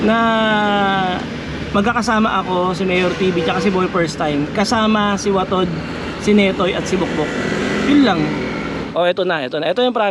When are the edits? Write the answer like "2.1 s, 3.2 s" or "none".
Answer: 8.8 s